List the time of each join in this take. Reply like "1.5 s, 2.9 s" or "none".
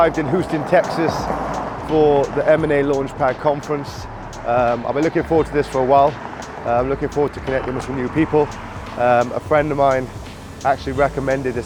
none